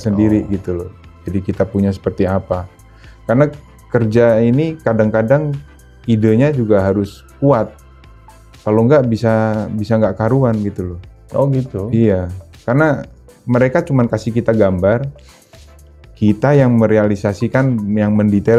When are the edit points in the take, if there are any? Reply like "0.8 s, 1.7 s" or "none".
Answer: none

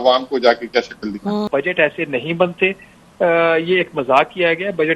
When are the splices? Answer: 1.5 s

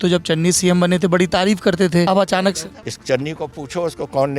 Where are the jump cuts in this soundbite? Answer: 2.3 s

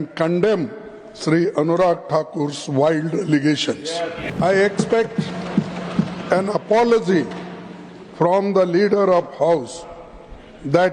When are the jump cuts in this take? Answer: 4.3 s

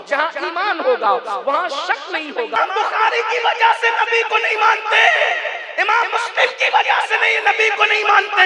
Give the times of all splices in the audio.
2.6 s

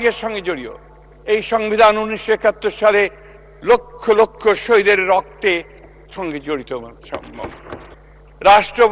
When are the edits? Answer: 7.9 s

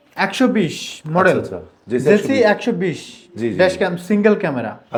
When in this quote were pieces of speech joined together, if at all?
none

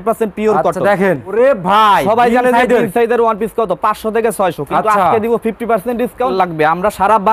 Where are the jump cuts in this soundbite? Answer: 1.3 s, 6.3 s

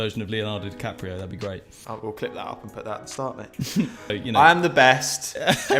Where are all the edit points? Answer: 1.8 s, 4.1 s

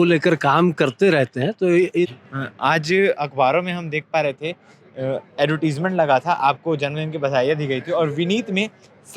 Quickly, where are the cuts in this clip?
2.1 s

